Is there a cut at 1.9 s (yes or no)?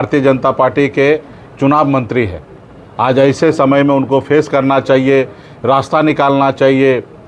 no